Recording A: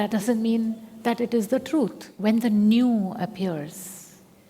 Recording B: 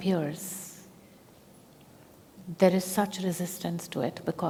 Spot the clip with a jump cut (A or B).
A